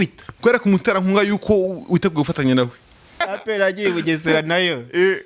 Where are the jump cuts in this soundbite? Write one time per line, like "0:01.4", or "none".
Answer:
0:03.2